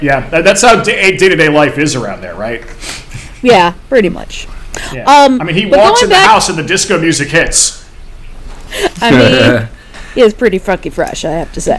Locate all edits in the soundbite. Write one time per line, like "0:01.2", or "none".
none